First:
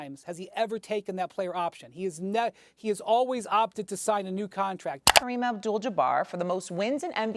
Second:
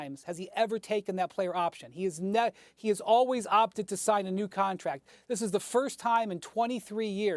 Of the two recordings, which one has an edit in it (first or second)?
first